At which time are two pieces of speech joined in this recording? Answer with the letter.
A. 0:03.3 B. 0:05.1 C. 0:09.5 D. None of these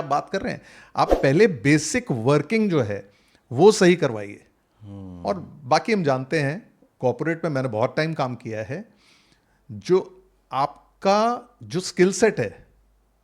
D